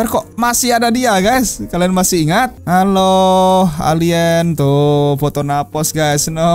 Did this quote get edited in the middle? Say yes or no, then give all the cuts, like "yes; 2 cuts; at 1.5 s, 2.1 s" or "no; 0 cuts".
yes; 1 cut; at 2.6 s